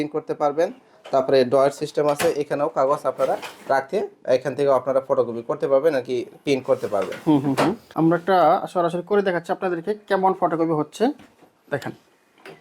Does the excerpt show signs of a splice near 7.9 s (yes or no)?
yes